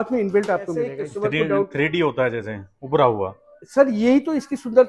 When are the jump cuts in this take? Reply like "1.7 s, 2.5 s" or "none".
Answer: 1.0 s